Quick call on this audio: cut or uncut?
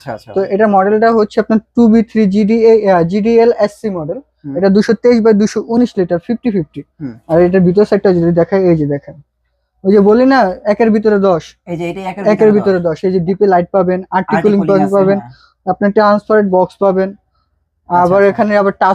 uncut